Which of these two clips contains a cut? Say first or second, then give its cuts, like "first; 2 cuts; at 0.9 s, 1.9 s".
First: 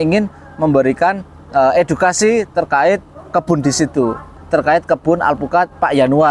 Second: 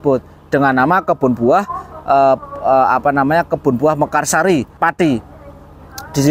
first; 1 cut; at 4.3 s